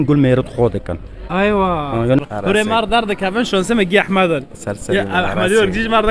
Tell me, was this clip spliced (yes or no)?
yes